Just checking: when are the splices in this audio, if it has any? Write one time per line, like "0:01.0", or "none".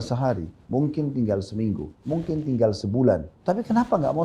0:03.3